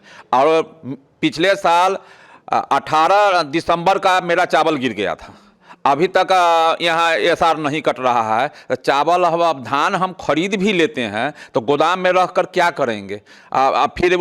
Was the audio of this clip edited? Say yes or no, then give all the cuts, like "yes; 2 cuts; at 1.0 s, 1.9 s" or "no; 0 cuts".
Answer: no; 0 cuts